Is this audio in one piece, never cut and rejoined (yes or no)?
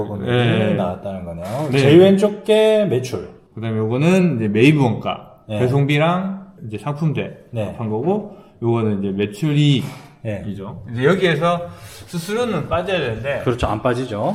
yes